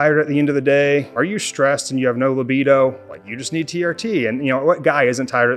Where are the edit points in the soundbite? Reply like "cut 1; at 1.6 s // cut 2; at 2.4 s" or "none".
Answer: cut 1; at 1.1 s